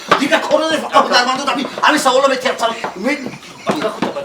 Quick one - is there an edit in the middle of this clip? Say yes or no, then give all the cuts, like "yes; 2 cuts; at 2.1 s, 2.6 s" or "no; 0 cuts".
no; 0 cuts